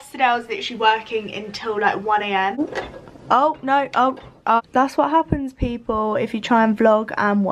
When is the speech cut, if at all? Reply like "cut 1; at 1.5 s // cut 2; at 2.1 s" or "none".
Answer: cut 1; at 2.6 s // cut 2; at 4.6 s